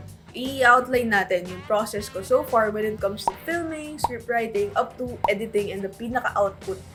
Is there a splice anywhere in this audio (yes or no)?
no